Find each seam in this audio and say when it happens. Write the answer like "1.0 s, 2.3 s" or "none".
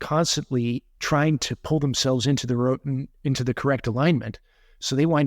0.9 s

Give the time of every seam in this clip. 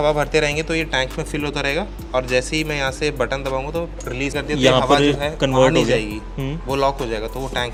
none

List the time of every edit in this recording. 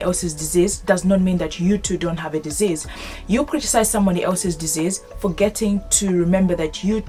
none

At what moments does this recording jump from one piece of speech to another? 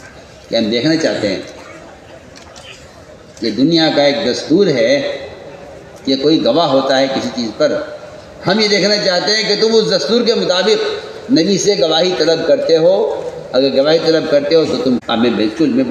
15.0 s

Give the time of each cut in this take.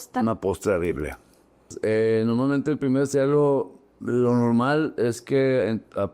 1.7 s

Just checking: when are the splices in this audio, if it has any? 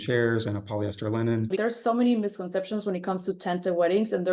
1.5 s

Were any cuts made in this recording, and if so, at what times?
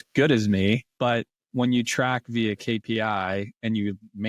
0.9 s

